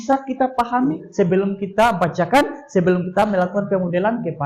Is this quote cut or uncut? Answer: cut